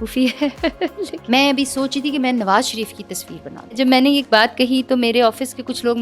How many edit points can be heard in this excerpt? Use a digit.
2